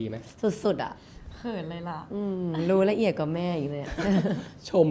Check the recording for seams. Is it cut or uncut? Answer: uncut